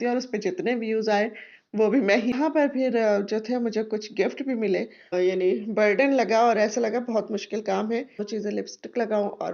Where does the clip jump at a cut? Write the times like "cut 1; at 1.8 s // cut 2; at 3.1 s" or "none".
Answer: cut 1; at 2.3 s // cut 2; at 5.1 s // cut 3; at 8.2 s